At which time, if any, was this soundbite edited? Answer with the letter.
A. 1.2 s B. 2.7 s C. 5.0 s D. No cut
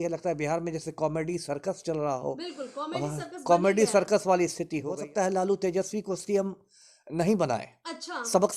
C